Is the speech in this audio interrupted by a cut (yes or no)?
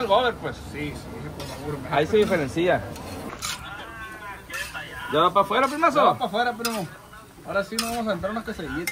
no